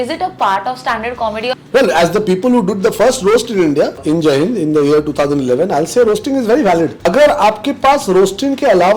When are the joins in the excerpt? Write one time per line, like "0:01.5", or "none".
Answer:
0:01.6
0:04.0
0:07.0